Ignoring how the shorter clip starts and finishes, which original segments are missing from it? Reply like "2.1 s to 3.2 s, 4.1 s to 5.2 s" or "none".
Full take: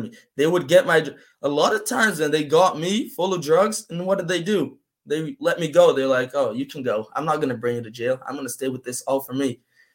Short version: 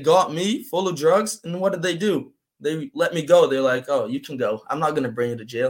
none